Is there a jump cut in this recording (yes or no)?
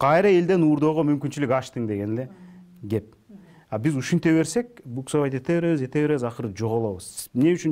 no